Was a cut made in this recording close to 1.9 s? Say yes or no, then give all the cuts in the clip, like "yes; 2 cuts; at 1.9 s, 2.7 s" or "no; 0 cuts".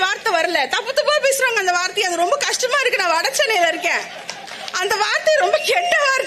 no; 0 cuts